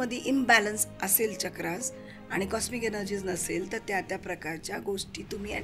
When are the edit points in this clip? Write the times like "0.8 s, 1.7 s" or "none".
none